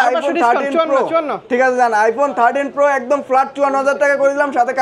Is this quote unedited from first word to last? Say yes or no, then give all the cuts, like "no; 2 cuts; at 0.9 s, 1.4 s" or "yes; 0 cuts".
yes; 0 cuts